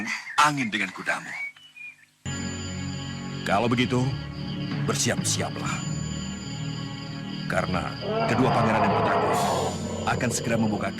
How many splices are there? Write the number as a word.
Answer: one